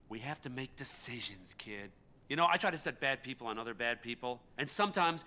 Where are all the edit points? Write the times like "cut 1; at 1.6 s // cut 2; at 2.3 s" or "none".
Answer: cut 1; at 3.1 s